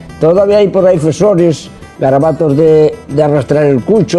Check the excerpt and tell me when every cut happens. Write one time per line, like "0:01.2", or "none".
none